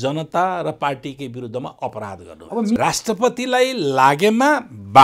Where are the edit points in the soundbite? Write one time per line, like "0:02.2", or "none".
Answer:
0:02.8